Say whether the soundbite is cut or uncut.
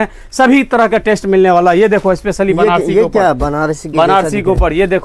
uncut